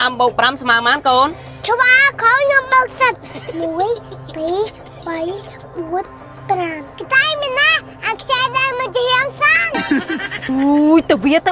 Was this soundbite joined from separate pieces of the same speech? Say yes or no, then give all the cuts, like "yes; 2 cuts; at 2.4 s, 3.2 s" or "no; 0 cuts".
no; 0 cuts